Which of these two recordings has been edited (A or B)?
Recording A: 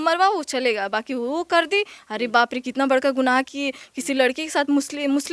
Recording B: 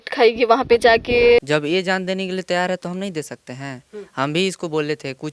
B